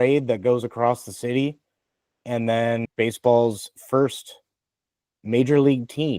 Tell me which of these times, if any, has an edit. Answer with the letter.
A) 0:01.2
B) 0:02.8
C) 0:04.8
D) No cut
B